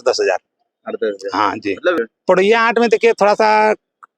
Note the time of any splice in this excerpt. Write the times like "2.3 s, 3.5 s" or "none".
2.0 s

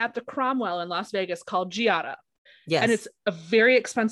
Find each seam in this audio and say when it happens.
2.3 s

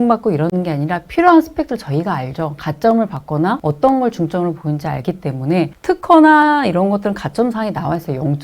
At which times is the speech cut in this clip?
3.6 s

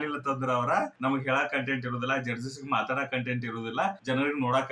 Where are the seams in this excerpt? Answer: none

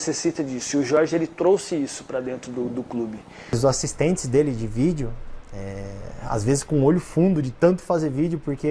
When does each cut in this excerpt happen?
3.6 s

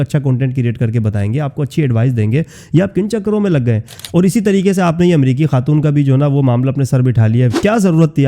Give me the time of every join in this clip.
none

